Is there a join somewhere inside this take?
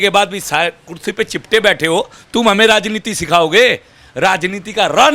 no; 0 cuts

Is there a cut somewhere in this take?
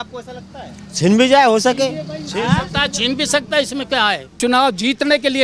yes; 1 cut; at 4.4 s

